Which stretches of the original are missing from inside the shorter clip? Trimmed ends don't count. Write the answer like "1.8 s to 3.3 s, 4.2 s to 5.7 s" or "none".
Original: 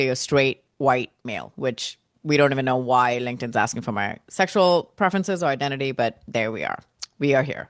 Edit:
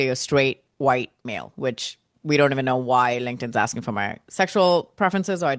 none